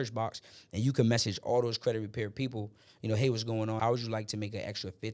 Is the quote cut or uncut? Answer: cut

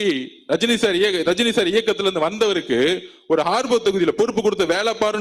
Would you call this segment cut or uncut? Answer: uncut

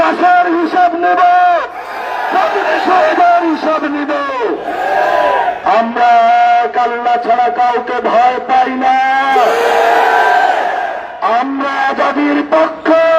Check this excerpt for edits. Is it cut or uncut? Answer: cut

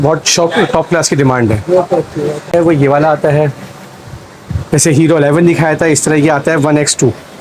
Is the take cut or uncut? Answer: cut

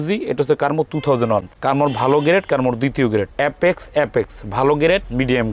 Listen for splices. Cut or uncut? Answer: uncut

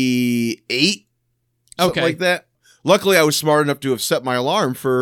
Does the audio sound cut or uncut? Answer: cut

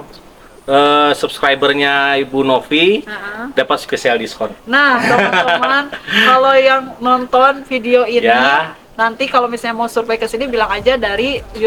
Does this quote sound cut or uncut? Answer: uncut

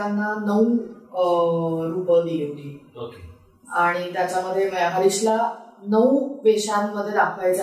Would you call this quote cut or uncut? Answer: uncut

